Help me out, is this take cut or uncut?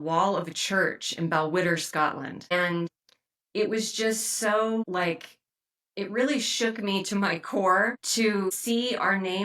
cut